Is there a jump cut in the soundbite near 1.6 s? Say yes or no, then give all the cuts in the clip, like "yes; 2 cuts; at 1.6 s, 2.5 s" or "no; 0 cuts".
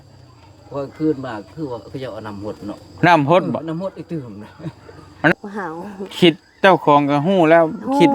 no; 1 cut; at 5.3 s